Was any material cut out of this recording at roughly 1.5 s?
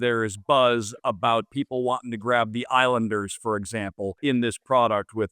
yes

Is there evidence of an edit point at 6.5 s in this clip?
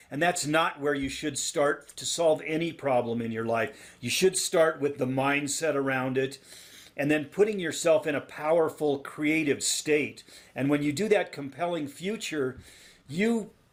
no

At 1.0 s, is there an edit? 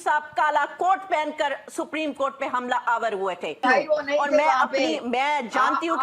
no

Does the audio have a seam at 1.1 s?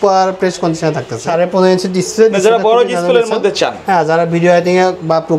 yes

